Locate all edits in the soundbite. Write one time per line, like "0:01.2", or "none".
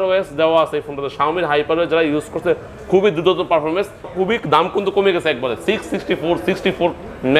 0:04.1